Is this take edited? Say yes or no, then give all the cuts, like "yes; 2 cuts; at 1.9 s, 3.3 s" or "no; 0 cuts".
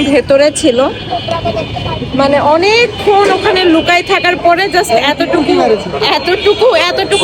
no; 0 cuts